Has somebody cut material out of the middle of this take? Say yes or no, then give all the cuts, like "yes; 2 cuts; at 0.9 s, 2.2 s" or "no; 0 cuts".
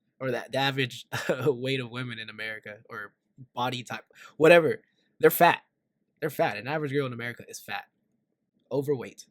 no; 0 cuts